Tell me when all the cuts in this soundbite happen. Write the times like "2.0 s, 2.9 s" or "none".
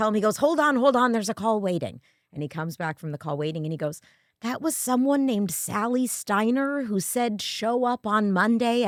none